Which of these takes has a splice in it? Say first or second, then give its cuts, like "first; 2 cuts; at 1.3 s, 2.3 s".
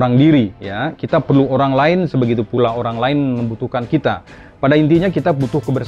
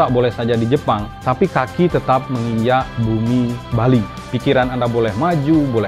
second; 3 cuts; at 1.1 s, 2.9 s, 4.2 s